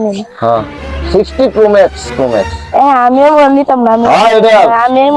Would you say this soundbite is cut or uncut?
cut